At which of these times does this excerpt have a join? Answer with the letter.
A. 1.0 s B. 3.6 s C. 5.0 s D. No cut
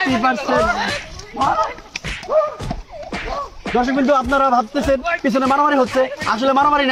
D